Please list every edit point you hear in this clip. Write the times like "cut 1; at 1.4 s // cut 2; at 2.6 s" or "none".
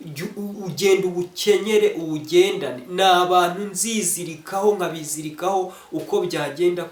none